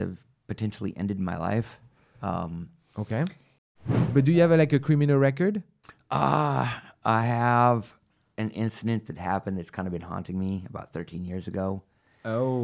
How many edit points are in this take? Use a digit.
1